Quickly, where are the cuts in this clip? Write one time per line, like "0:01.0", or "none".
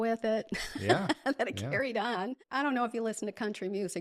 0:02.4